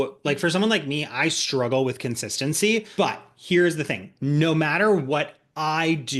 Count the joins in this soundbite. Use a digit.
1